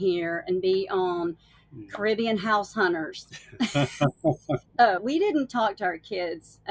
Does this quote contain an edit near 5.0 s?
yes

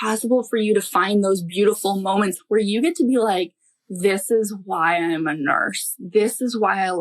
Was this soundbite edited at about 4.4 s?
no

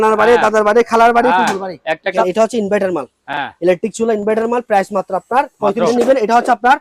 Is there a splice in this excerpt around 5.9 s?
yes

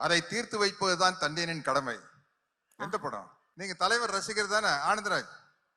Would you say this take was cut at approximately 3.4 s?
yes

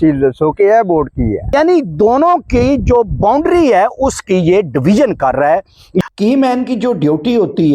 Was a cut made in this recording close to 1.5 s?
yes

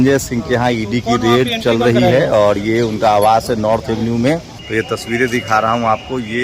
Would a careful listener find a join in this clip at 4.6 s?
yes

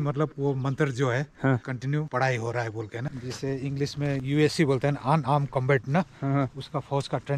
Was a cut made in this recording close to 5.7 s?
no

